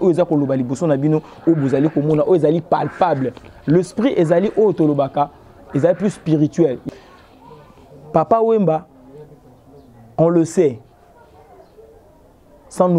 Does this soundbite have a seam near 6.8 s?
yes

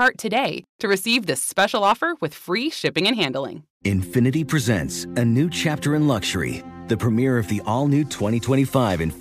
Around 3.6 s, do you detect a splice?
yes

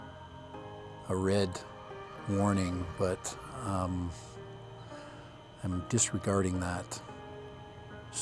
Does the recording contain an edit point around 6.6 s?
no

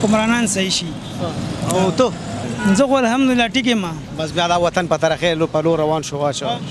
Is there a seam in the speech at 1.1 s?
no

